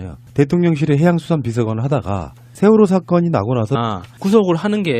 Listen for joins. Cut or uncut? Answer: uncut